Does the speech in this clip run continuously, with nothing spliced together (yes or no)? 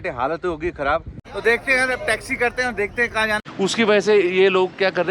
no